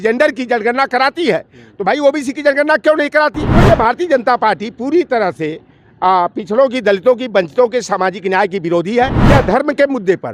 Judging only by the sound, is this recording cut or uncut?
cut